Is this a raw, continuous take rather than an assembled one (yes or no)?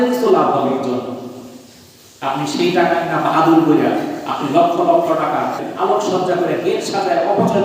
no